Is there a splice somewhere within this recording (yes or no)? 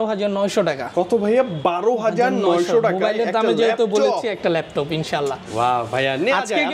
no